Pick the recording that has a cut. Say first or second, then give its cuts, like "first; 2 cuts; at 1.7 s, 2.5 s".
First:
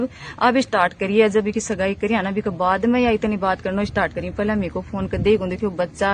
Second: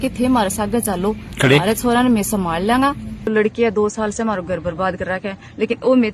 second; 1 cut; at 3.3 s